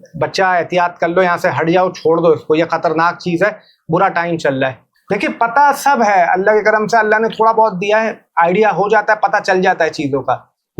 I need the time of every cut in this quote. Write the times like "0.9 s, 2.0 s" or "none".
4.9 s